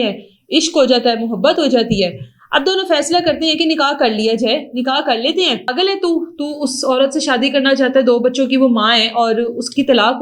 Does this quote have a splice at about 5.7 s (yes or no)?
yes